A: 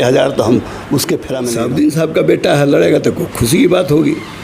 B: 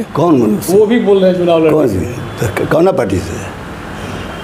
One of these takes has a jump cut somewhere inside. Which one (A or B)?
A